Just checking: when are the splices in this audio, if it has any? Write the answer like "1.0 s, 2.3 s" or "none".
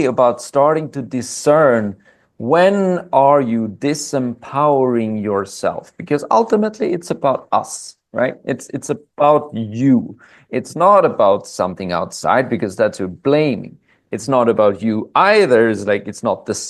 none